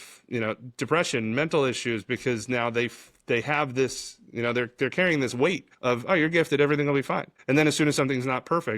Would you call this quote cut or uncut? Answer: cut